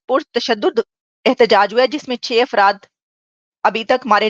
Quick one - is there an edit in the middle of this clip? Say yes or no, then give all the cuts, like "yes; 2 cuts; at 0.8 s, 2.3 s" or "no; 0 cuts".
no; 0 cuts